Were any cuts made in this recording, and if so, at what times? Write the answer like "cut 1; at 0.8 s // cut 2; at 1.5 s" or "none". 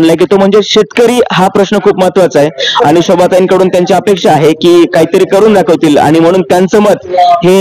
none